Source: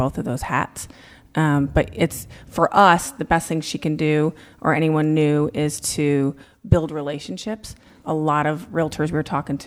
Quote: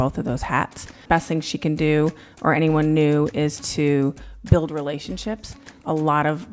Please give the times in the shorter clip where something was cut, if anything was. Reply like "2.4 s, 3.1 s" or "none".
0.9 s